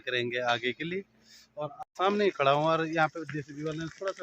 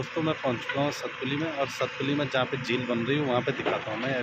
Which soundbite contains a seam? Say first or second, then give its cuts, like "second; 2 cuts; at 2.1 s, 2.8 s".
first; 1 cut; at 1.8 s